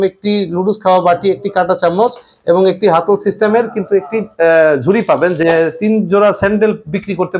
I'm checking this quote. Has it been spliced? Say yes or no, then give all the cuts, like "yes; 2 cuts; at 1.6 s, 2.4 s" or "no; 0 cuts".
yes; 1 cut; at 5.4 s